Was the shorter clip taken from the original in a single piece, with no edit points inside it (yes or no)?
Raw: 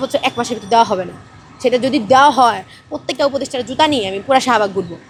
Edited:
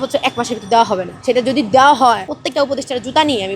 no